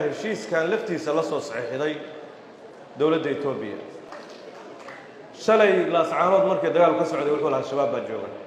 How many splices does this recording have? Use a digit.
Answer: 1